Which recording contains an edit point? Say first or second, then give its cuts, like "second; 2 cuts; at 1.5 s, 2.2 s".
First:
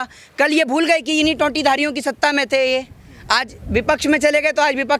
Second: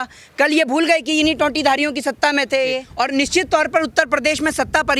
second; 1 cut; at 2.9 s